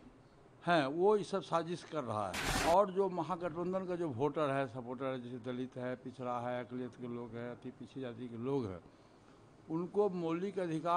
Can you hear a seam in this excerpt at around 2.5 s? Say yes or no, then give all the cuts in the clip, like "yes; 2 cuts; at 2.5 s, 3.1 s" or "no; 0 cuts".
yes; 1 cut; at 2.5 s